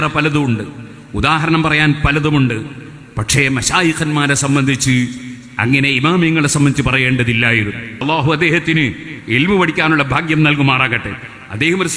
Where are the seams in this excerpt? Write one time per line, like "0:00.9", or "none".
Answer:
0:08.0